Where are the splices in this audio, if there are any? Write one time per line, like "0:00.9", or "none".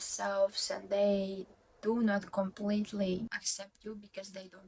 0:03.5